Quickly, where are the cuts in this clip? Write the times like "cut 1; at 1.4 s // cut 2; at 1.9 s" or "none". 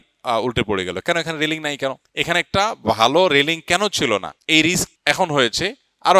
cut 1; at 2.0 s // cut 2; at 4.3 s // cut 3; at 4.9 s